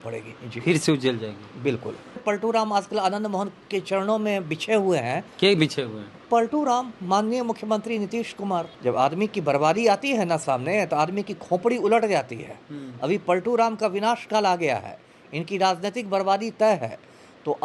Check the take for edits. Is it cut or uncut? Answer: cut